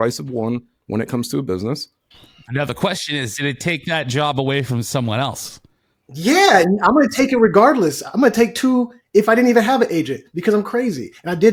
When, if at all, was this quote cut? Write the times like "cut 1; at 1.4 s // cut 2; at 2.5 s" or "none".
none